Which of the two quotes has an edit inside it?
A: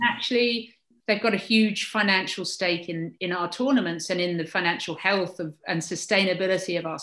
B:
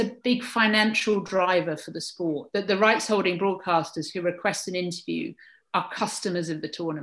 A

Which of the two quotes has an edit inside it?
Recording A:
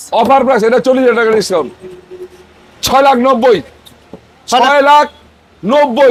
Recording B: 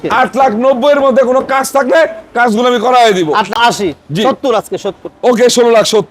B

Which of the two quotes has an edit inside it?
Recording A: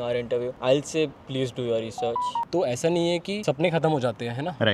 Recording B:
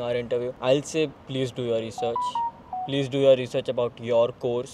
A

